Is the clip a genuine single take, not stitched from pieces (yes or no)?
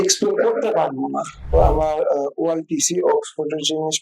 no